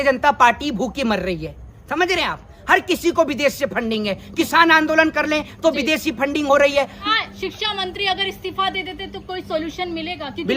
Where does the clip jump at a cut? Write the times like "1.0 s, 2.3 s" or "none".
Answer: 7.1 s